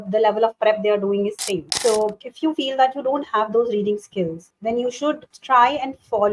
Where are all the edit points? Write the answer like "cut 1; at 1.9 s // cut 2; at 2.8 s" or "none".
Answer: cut 1; at 1.7 s // cut 2; at 2.2 s // cut 3; at 4.5 s // cut 4; at 5.3 s